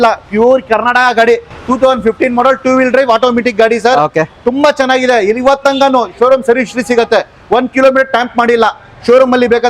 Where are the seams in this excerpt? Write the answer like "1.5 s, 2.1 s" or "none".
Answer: none